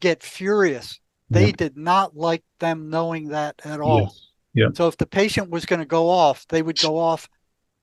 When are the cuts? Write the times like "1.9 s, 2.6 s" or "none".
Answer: none